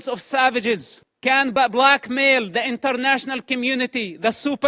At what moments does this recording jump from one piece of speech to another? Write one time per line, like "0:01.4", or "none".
0:01.6